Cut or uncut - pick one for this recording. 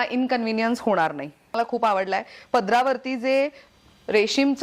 cut